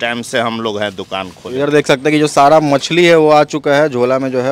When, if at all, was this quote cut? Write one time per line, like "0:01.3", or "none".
0:01.4